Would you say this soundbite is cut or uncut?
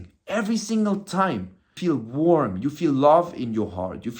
cut